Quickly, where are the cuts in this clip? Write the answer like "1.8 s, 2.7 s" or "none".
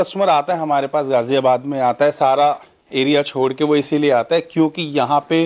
none